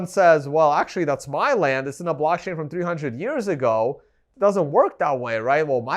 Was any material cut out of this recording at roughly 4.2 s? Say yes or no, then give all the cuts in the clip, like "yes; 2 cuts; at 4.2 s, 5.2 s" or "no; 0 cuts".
yes; 1 cut; at 4.2 s